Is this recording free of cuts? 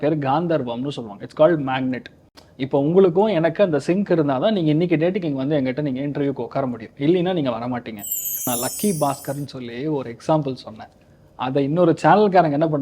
no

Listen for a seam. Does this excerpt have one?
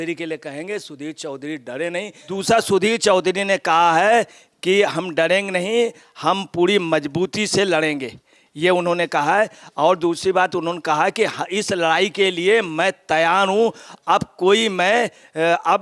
yes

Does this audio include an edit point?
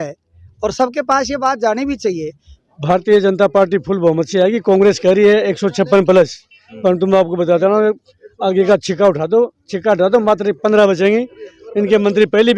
yes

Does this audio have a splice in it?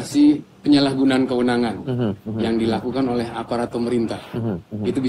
no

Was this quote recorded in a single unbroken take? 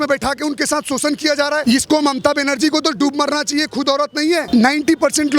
no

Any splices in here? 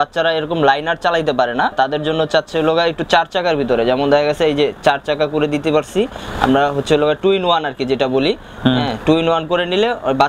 no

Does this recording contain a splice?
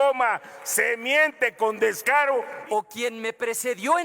yes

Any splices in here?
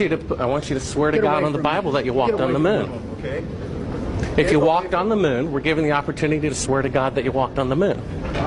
no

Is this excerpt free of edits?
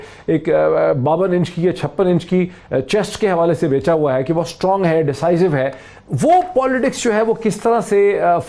yes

